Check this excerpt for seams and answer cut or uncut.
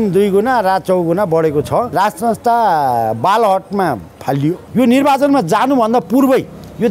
cut